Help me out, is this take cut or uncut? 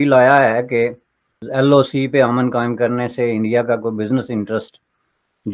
uncut